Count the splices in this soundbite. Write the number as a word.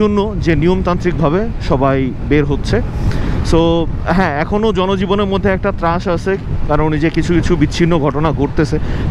zero